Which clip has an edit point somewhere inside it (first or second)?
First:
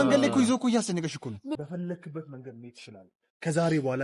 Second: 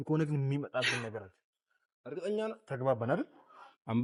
first